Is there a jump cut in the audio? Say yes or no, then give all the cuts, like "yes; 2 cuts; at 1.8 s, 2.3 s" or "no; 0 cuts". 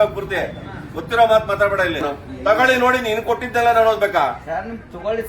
yes; 1 cut; at 2.0 s